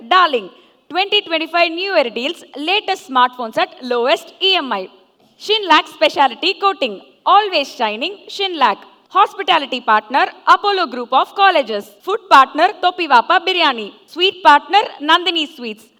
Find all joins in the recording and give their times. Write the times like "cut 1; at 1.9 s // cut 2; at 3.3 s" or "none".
none